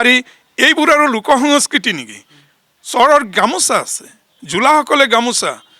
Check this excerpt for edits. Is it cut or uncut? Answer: uncut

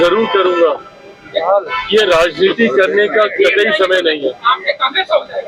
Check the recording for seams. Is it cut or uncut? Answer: uncut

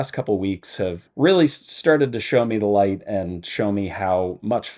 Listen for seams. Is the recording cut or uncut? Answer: cut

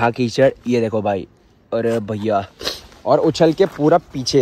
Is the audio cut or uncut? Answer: uncut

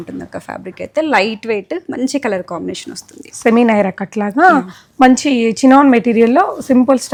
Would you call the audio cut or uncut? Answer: uncut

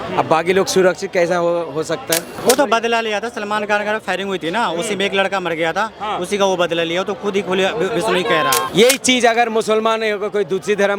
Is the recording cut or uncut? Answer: cut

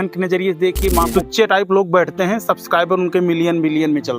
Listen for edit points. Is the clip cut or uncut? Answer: cut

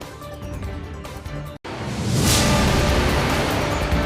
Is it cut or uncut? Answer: cut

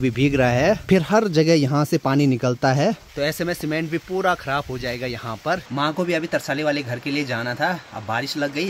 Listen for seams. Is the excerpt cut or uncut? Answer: cut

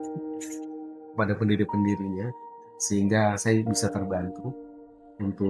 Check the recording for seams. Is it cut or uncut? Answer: uncut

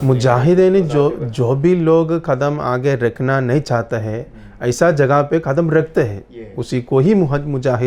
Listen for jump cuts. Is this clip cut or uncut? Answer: uncut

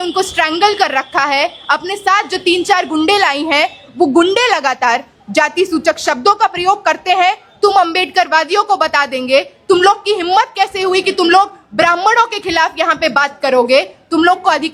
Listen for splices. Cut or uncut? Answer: uncut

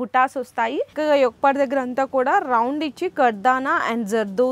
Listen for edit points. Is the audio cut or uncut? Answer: cut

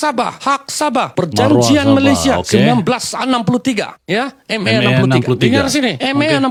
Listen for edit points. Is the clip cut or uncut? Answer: uncut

